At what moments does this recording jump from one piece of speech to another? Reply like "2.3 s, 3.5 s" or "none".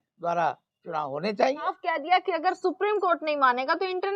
1.6 s